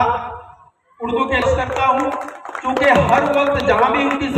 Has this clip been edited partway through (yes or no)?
yes